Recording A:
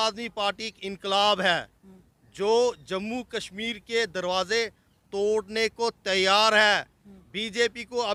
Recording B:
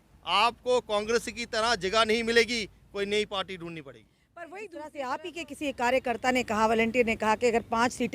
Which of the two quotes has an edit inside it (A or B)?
B